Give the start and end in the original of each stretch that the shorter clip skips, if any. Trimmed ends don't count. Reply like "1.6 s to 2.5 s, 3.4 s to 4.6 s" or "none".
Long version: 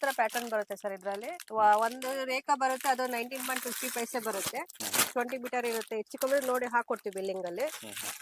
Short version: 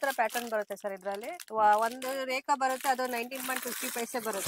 none